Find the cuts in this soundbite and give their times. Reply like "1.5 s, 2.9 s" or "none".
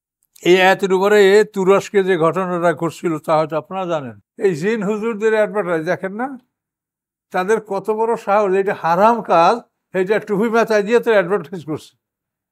4.2 s